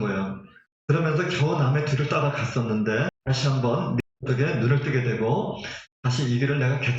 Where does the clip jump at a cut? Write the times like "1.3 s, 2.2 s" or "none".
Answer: 3.2 s